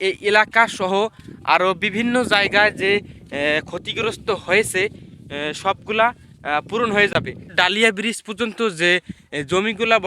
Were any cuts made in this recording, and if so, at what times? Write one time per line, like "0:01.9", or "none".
none